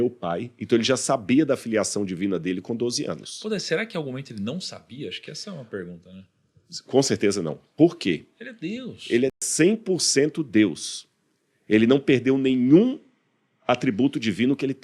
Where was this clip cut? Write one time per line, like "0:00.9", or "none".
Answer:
0:09.4